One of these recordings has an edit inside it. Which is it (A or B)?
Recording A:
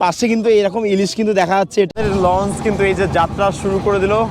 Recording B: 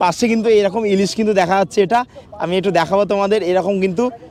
A